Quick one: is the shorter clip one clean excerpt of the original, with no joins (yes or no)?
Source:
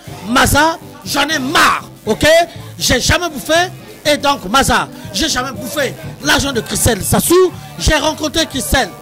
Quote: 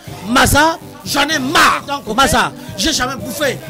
no